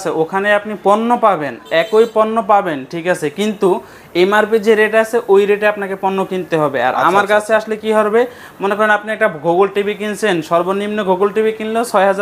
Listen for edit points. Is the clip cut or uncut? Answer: uncut